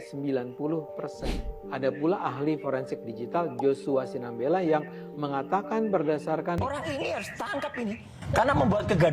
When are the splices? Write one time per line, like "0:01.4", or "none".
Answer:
0:06.6

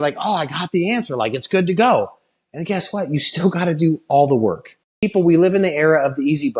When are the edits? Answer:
0:05.1

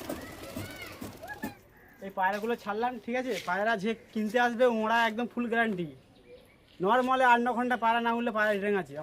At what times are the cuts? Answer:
0:01.6

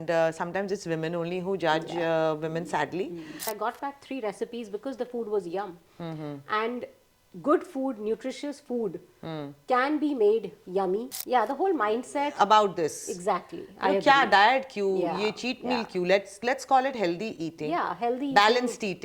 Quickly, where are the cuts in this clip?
0:03.5
0:11.1

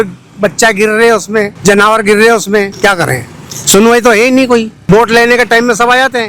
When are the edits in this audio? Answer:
0:01.5
0:02.7
0:04.7

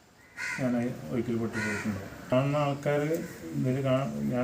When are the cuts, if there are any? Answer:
0:02.3

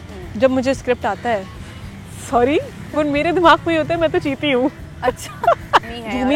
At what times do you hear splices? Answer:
none

